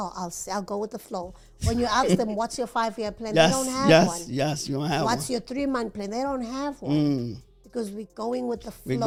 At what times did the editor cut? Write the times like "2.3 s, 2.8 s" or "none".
none